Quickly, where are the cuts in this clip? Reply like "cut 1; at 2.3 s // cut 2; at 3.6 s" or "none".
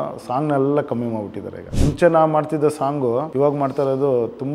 cut 1; at 1.7 s // cut 2; at 3.3 s